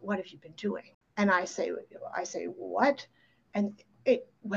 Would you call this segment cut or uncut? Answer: cut